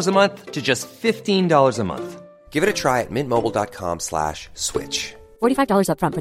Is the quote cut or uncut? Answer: uncut